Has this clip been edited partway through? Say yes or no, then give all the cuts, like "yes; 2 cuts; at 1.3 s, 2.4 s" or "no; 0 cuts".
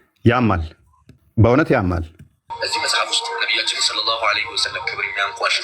yes; 1 cut; at 2.4 s